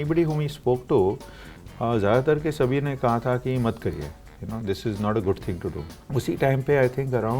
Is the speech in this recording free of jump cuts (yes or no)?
no